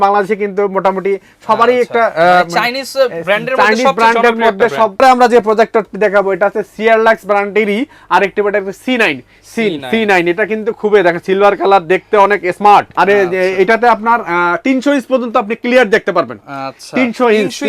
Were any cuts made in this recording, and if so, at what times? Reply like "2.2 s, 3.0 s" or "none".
5.0 s, 12.9 s